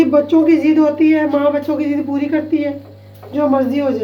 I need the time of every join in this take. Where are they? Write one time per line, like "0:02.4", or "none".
none